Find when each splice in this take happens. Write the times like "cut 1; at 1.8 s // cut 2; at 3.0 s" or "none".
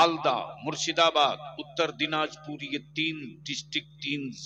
none